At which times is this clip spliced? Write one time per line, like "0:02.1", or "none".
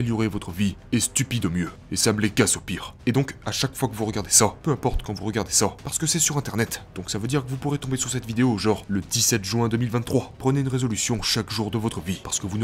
none